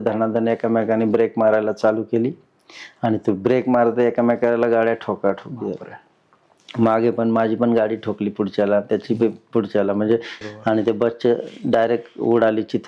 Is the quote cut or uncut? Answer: cut